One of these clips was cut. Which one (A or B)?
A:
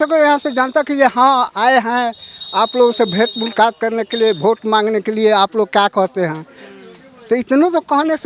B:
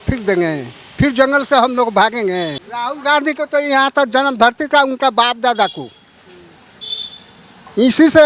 B